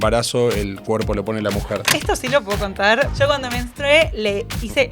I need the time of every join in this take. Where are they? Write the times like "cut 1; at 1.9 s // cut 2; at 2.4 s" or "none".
cut 1; at 1.8 s // cut 2; at 3.1 s